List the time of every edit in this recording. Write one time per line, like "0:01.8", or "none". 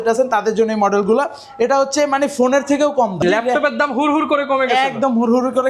0:03.2